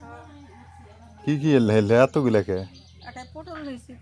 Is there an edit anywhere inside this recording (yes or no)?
no